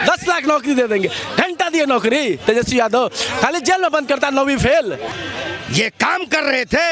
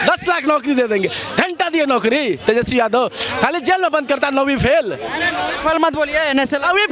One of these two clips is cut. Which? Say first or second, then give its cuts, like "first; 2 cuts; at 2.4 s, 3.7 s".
first; 1 cut; at 5.1 s